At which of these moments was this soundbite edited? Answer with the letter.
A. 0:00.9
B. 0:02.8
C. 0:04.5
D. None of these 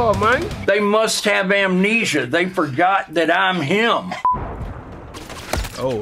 C